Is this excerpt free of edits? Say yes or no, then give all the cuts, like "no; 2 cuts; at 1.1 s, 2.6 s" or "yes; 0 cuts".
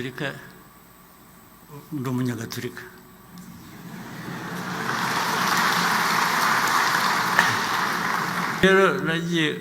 no; 1 cut; at 8.6 s